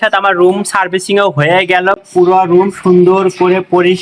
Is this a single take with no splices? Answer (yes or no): yes